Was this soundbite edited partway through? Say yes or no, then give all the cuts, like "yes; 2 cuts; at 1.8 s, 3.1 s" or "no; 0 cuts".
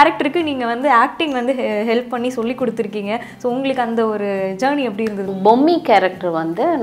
yes; 1 cut; at 5.3 s